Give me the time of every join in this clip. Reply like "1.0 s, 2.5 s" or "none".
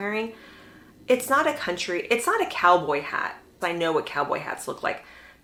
none